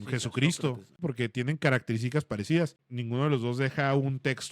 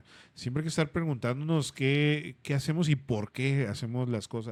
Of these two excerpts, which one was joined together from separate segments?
first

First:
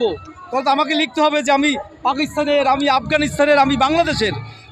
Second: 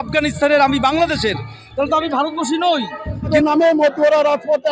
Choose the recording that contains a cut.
second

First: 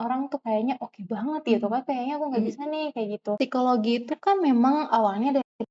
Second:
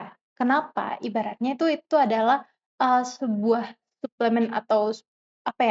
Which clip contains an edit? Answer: first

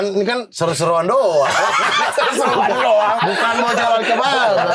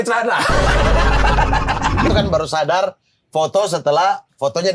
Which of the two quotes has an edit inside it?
second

